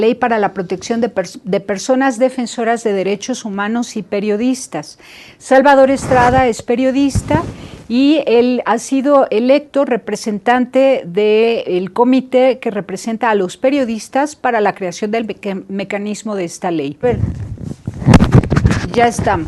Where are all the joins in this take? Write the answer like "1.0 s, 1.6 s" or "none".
none